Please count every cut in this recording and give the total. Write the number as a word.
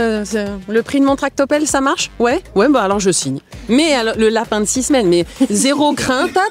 zero